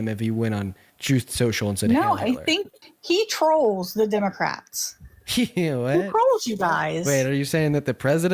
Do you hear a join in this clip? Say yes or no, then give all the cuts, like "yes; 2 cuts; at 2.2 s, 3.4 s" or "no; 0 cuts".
no; 0 cuts